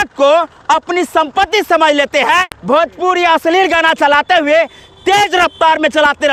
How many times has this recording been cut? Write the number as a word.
one